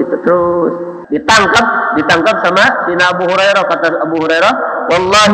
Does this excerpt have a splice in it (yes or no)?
yes